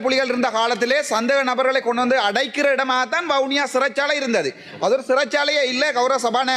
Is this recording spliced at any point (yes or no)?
no